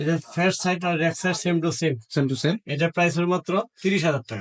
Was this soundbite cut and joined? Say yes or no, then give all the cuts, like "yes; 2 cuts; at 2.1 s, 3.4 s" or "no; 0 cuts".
no; 0 cuts